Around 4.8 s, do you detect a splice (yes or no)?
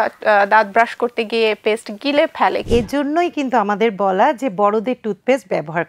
no